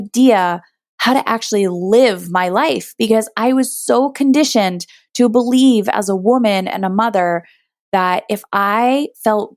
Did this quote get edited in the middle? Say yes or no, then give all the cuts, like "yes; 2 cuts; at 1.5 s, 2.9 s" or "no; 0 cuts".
no; 0 cuts